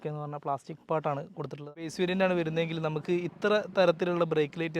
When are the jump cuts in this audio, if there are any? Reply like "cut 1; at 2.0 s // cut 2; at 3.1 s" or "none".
cut 1; at 1.8 s